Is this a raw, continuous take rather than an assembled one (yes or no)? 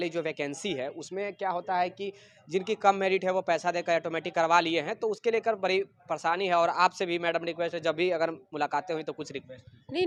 yes